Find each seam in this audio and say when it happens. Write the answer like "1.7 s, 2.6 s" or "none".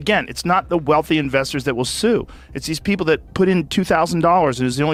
none